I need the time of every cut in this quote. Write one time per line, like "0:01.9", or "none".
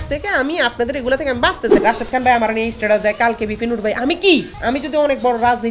0:01.8
0:04.5